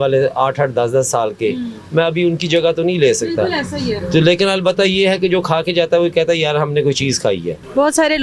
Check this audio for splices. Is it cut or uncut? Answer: uncut